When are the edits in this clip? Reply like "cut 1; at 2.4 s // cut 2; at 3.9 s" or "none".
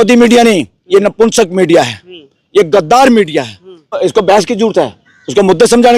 cut 1; at 4.0 s